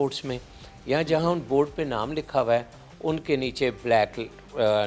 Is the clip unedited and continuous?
yes; 0 cuts

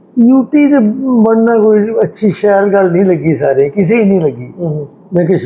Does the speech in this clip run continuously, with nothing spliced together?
yes; 0 cuts

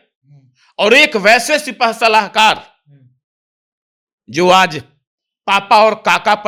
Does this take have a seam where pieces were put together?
no; 0 cuts

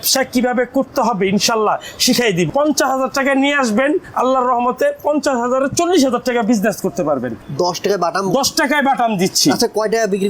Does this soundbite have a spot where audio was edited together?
yes; 2 cuts; at 2.5 s, 7.3 s

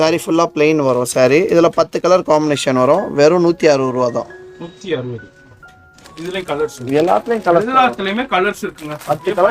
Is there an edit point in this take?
no; 0 cuts

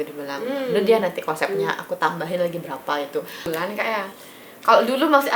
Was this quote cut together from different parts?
yes; 1 cut; at 3.5 s

